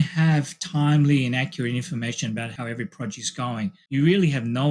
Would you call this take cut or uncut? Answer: cut